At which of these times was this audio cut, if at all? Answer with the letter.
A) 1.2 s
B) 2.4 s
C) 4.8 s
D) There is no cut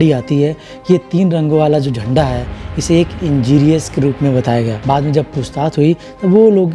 D